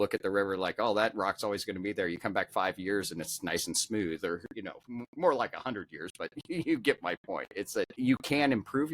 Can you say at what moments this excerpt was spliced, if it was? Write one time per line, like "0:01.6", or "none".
0:07.9